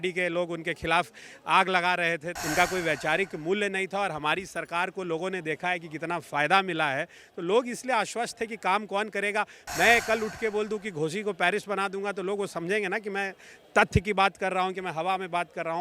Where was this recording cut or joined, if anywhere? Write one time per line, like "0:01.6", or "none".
0:02.3